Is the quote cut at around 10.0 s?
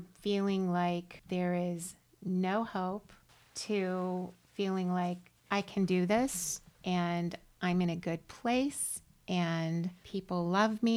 yes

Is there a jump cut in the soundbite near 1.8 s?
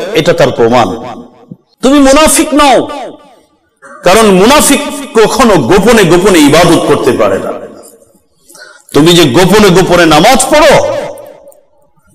yes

